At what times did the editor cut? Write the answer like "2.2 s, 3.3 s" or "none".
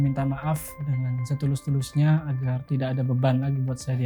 none

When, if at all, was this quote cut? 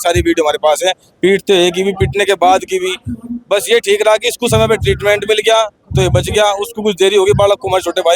none

